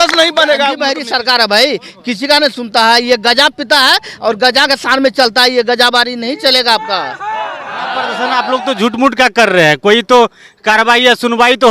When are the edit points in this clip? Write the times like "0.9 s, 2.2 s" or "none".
0.9 s, 8.1 s